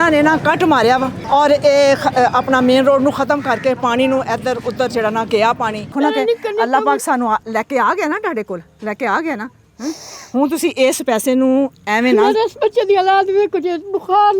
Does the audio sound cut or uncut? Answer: cut